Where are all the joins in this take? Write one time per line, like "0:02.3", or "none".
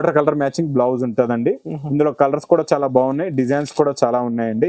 none

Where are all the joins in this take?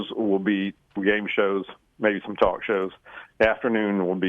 0:01.0

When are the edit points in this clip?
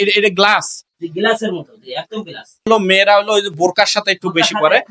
0:02.7

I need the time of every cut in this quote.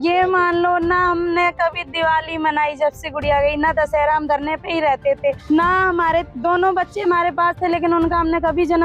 0:05.4
0:06.3

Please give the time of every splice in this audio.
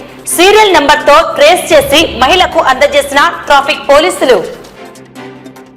none

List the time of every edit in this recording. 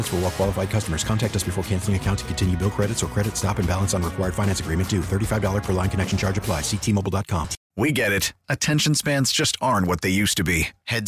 0:07.6

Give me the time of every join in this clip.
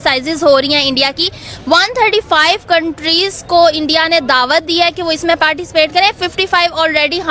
none

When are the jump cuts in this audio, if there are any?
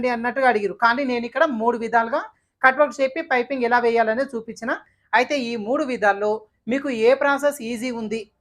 0:04.9

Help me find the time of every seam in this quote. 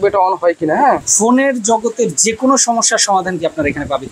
0:01.1

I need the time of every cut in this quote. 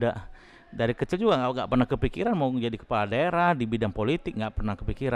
none

